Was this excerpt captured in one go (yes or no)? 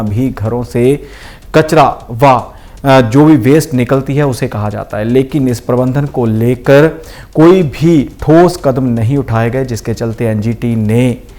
yes